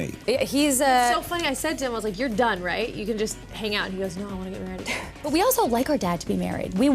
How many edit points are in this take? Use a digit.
1